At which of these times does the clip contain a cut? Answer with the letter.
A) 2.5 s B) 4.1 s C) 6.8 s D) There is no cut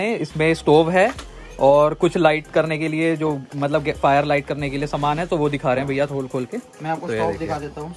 D